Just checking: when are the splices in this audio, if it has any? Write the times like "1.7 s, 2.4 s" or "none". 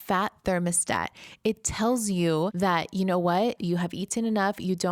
2.5 s

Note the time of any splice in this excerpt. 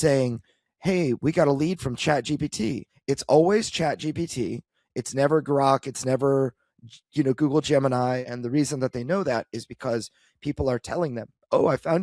2.9 s, 8.2 s

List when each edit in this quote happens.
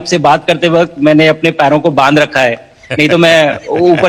none

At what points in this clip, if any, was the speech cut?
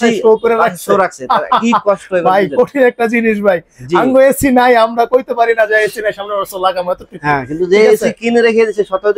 none

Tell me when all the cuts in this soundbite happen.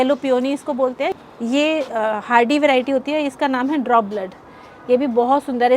1.1 s

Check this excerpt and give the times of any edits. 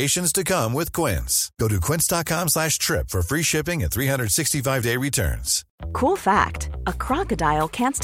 5.7 s

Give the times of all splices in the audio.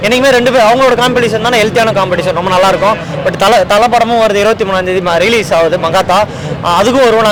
none

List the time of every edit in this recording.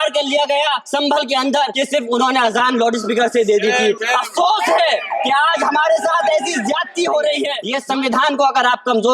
0.8 s, 1.7 s, 4.0 s, 7.7 s

